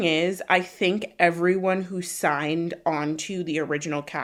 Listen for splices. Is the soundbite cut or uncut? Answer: uncut